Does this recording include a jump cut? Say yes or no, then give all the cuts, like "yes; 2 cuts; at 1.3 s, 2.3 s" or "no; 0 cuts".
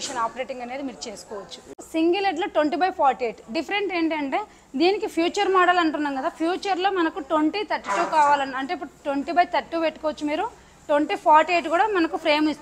no; 0 cuts